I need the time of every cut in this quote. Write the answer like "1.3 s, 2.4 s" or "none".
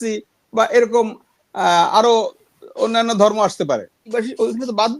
4.1 s